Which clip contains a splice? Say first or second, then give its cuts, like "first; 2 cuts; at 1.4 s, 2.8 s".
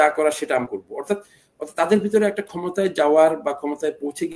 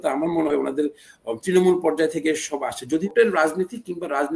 second; 1 cut; at 3.0 s